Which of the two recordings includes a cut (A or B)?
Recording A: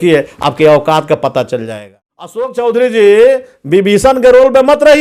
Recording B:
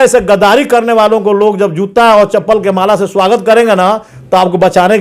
A